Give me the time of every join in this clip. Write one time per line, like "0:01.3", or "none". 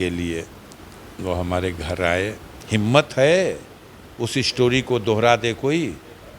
0:02.5